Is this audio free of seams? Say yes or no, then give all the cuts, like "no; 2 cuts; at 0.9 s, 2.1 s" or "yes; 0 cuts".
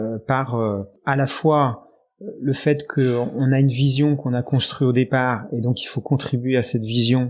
no; 1 cut; at 0.9 s